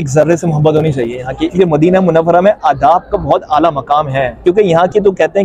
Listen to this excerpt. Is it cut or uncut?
cut